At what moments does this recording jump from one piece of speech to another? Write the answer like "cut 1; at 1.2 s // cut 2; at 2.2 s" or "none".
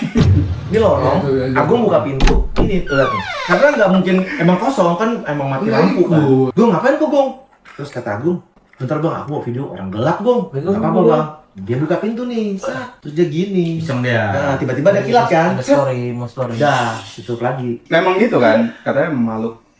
cut 1; at 6.5 s // cut 2; at 17.8 s